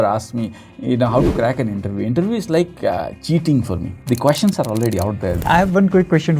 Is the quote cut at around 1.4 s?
no; 3 cuts; at 3.1 s, 3.9 s, 5.4 s

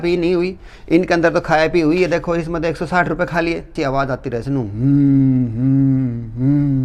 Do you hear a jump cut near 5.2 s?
no; 1 cut; at 3.7 s

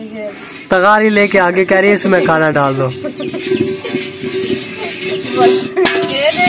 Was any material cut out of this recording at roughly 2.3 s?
no; 0 cuts

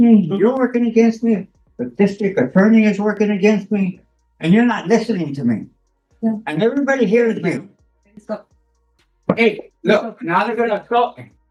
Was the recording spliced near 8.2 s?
no; 0 cuts

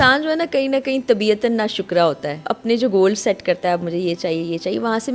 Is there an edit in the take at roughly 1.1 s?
no; 1 cut; at 2.4 s

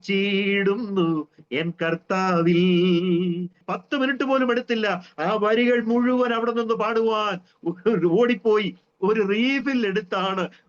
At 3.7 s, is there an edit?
yes; 1 cut; at 3.7 s

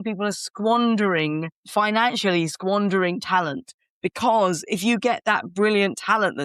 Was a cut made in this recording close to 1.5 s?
yes; 1 cut; at 1.5 s

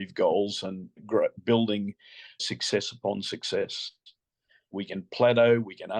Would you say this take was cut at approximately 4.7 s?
yes; 3 cuts; at 1.0 s, 2.4 s, 4.7 s

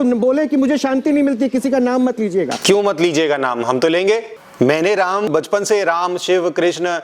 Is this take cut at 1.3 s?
no; 3 cuts; at 2.5 s, 4.4 s, 5.3 s

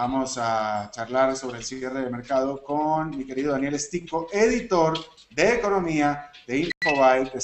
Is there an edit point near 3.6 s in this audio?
yes; 1 cut; at 3.6 s

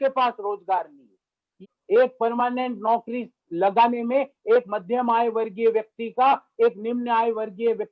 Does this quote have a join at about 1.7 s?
yes; 1 cut; at 1.7 s

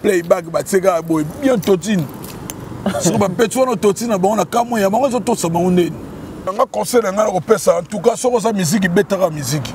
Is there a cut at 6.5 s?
yes; 1 cut; at 6.5 s

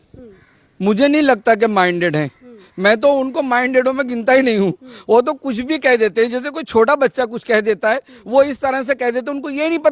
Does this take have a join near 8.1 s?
no; 0 cuts

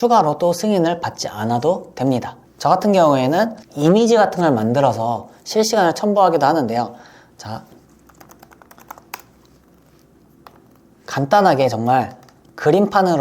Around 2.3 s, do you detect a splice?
yes; 1 cut; at 2.3 s

